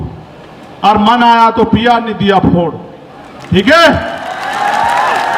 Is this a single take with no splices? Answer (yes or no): yes